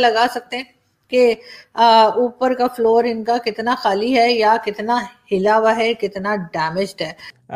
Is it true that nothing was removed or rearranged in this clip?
yes; 0 cuts

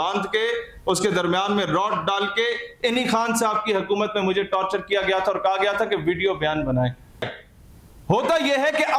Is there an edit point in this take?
yes; 1 cut; at 7.3 s

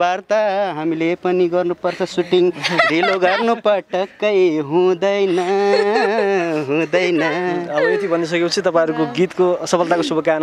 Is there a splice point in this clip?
no; 0 cuts

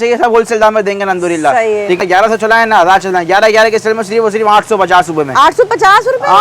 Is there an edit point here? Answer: yes; 1 cut; at 2.0 s

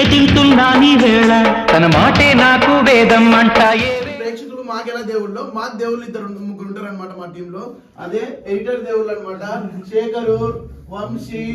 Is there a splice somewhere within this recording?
yes; 1 cut; at 4.0 s

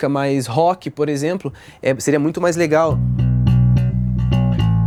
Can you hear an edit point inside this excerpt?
no; 0 cuts

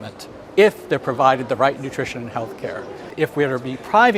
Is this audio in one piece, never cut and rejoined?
no; 1 cut; at 3.1 s

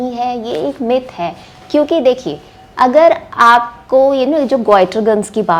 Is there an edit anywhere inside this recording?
no; 0 cuts

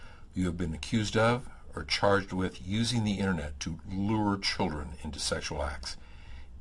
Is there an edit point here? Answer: no; 0 cuts

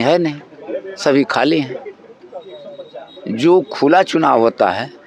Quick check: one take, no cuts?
yes; 0 cuts

